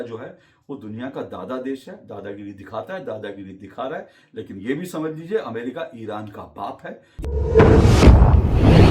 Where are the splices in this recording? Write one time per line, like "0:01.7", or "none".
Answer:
0:07.1